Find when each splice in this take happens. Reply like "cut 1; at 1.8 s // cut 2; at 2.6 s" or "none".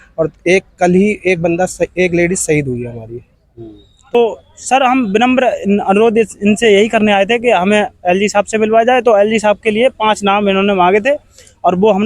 cut 1; at 4.1 s